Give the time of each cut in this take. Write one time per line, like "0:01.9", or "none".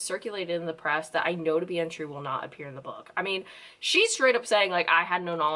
none